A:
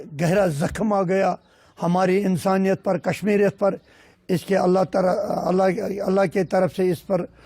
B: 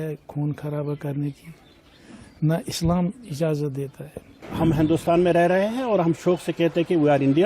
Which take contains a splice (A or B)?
B